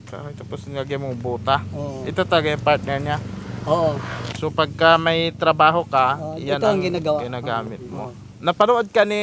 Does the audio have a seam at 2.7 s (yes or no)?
no